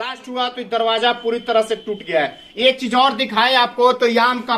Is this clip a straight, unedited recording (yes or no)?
yes